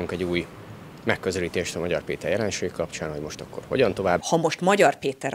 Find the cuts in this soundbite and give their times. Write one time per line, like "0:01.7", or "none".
0:04.2